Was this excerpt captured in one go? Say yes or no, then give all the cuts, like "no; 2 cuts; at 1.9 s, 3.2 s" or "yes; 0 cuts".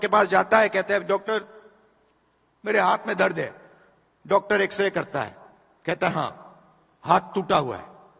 yes; 0 cuts